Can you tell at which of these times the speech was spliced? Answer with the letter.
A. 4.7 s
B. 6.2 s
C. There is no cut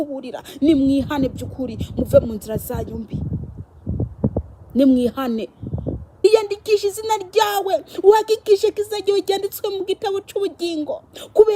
B